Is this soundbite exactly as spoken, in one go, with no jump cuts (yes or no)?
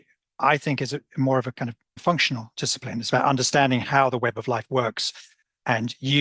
no